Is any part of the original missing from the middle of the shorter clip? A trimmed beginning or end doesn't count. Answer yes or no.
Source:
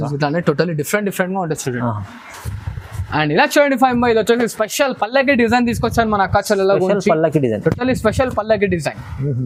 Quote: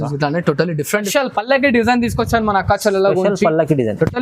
yes